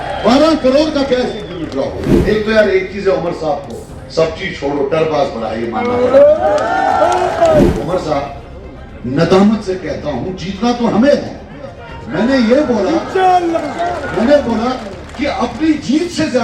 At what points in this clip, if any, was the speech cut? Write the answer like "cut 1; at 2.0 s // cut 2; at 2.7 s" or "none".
cut 1; at 2.1 s // cut 2; at 7.7 s